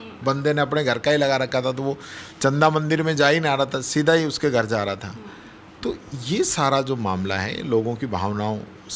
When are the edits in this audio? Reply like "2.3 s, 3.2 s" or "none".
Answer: none